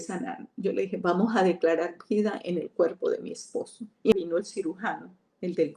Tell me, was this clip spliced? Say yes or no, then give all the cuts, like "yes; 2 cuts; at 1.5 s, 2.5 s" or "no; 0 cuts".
yes; 1 cut; at 4.1 s